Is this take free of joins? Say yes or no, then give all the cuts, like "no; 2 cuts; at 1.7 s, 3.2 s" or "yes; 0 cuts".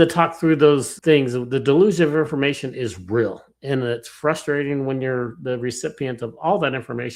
no; 1 cut; at 0.9 s